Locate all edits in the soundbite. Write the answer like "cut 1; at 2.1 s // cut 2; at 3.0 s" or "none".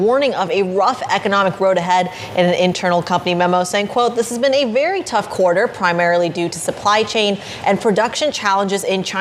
none